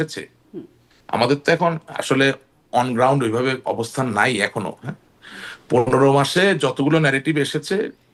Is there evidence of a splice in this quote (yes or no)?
no